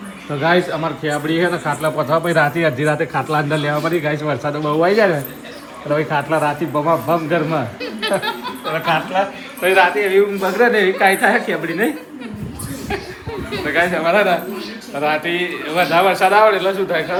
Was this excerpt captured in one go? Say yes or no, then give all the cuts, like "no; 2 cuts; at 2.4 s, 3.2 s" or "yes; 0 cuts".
yes; 0 cuts